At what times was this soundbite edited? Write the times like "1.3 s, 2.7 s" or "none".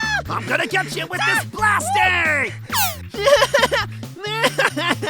3.0 s